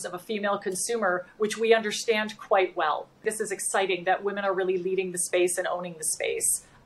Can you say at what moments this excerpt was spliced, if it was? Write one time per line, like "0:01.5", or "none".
0:03.2